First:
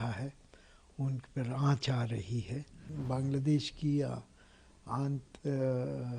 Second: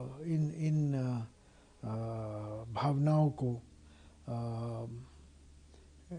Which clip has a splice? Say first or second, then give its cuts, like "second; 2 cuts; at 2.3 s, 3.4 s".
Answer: first; 1 cut; at 2.9 s